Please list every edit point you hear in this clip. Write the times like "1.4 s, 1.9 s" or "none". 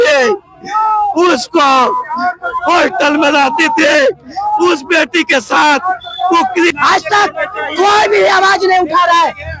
6.7 s